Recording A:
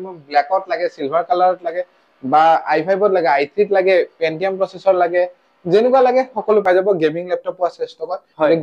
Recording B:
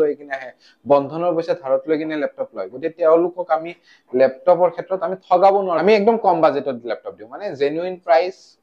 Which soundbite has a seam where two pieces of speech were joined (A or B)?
B